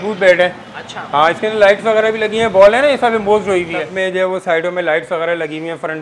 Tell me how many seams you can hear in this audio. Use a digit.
1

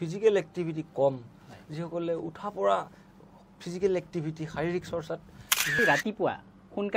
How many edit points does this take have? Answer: 1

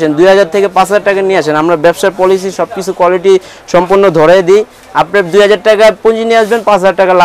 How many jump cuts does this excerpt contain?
0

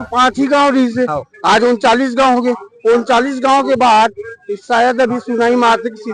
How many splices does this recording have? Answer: 0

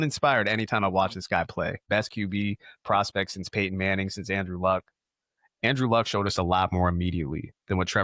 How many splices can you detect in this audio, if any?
1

